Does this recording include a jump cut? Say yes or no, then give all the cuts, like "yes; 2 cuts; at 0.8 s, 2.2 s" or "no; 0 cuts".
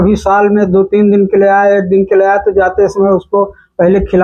no; 0 cuts